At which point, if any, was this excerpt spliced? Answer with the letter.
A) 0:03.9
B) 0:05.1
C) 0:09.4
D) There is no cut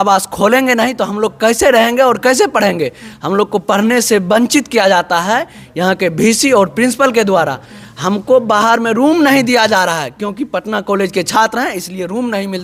D